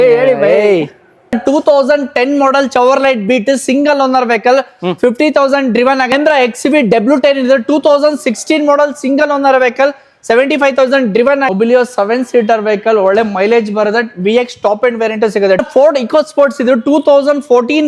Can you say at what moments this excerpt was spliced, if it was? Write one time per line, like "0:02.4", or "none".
0:01.1
0:06.0
0:11.5
0:15.6